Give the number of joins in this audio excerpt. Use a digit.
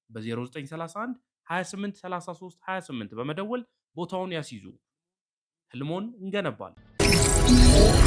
1